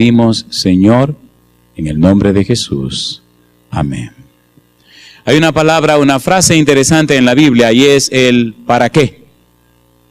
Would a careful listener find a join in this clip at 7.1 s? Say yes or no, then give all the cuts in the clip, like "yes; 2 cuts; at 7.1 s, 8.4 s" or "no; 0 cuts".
yes; 1 cut; at 7.1 s